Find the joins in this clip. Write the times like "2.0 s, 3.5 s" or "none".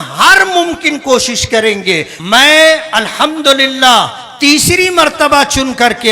2.1 s